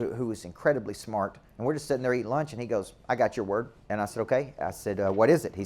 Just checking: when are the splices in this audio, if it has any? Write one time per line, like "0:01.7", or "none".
0:01.4
0:03.8